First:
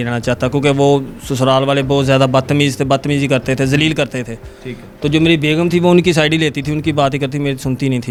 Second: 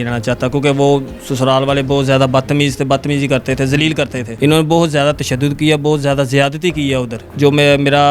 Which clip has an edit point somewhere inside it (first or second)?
second